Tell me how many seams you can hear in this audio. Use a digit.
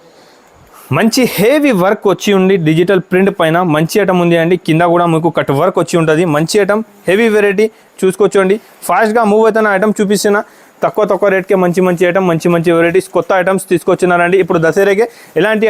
0